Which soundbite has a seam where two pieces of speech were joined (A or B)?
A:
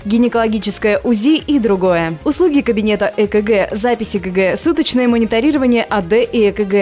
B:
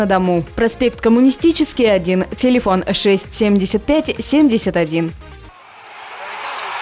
B